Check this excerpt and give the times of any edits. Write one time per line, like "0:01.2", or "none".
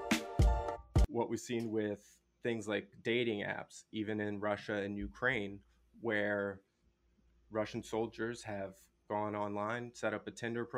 0:01.0